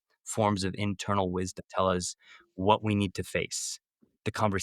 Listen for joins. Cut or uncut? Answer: cut